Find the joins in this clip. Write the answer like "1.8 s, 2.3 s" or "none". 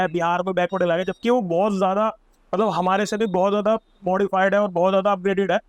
none